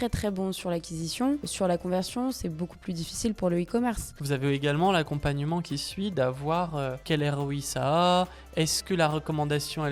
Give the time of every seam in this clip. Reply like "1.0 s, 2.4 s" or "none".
1.5 s, 4.1 s, 7.0 s